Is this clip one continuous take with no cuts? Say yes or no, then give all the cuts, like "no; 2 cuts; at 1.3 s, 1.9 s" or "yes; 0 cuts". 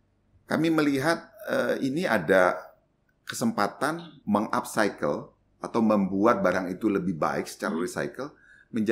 no; 1 cut; at 4.0 s